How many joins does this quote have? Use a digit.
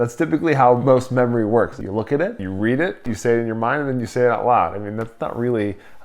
3